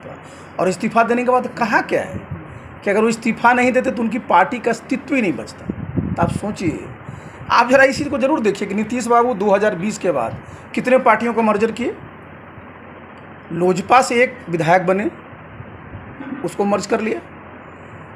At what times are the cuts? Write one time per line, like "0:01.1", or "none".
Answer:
none